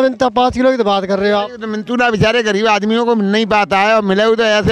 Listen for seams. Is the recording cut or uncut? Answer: uncut